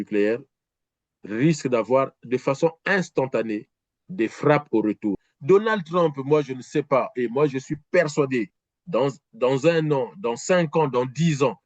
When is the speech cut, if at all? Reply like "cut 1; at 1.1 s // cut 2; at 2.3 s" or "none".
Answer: cut 1; at 5.2 s